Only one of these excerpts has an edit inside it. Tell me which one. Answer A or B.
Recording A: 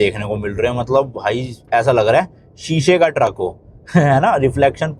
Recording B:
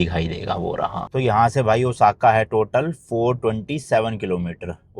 B